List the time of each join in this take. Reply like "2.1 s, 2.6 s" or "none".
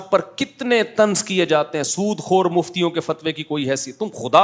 none